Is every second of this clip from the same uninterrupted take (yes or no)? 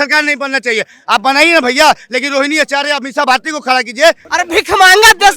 no